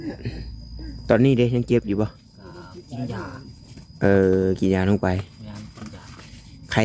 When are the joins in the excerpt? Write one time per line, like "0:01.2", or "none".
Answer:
none